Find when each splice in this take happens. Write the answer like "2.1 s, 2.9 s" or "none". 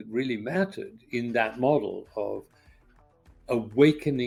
none